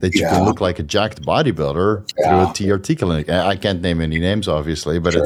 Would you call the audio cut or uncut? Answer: uncut